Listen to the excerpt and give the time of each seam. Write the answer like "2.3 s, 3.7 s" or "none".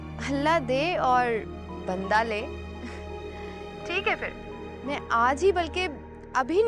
none